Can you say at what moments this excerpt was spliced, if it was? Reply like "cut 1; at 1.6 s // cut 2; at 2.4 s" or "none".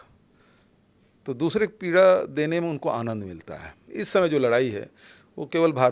cut 1; at 3.9 s